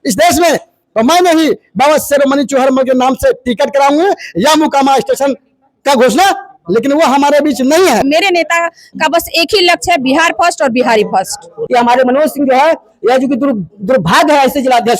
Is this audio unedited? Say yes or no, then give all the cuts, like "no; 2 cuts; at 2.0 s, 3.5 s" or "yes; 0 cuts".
no; 2 cuts; at 8.0 s, 11.6 s